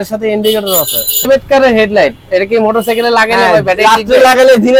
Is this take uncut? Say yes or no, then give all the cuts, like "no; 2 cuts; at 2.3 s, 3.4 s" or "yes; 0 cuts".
no; 1 cut; at 1.3 s